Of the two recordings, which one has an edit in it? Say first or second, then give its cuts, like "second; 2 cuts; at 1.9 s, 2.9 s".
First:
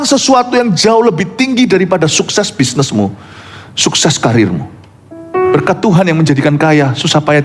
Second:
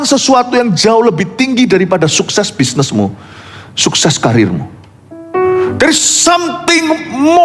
first; 1 cut; at 5.5 s